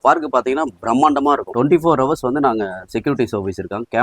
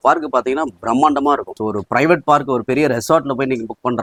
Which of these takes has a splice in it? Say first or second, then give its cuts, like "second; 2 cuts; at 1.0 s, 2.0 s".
first; 1 cut; at 1.5 s